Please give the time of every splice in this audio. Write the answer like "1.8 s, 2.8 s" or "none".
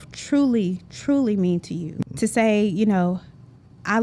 1.9 s